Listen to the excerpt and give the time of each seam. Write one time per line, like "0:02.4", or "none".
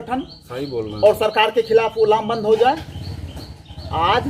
none